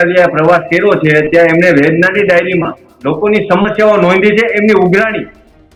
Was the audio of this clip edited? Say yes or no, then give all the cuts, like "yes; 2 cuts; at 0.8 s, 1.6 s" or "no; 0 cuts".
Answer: no; 0 cuts